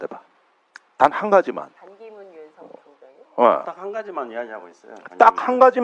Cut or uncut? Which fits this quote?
uncut